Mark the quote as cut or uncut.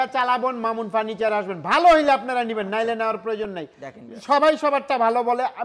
uncut